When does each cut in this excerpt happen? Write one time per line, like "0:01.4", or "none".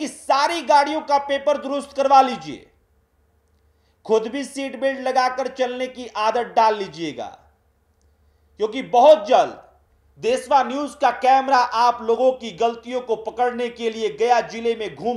none